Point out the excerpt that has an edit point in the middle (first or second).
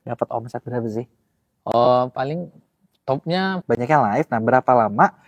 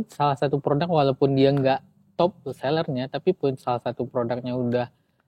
first